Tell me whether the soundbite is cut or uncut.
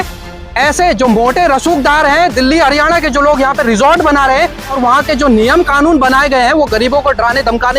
cut